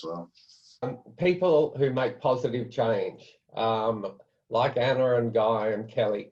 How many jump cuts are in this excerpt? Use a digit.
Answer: 1